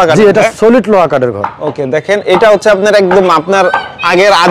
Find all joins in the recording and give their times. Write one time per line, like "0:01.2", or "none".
none